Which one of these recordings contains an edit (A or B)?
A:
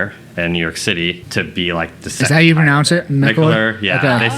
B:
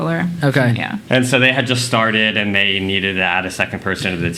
A